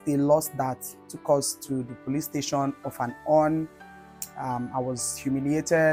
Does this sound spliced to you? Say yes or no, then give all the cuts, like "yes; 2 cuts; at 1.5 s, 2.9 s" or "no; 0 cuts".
no; 0 cuts